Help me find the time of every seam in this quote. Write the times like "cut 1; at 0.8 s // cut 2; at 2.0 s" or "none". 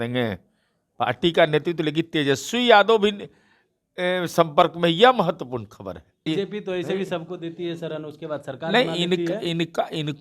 cut 1; at 6.3 s

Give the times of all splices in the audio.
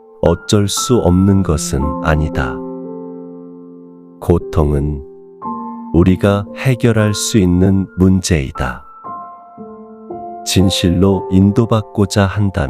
cut 1; at 2.4 s // cut 2; at 4.1 s

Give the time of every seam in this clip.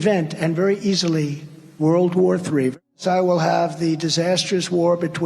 cut 1; at 2.7 s

